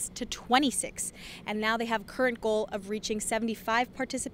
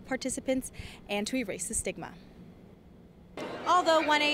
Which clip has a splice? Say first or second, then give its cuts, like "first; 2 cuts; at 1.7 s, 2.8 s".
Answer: second; 1 cut; at 3.4 s